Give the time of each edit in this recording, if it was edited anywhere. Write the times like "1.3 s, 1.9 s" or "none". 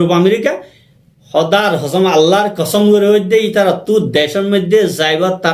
none